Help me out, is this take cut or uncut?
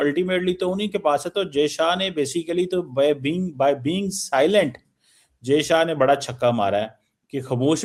uncut